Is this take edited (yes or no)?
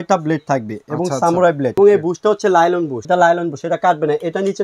yes